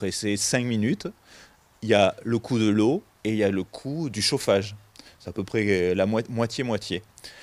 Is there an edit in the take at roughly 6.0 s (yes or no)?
yes